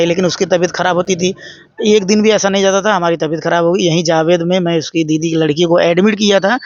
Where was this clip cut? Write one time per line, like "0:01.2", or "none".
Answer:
none